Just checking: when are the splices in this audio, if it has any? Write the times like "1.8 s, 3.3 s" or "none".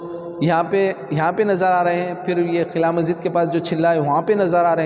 none